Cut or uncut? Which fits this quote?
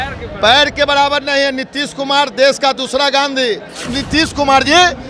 cut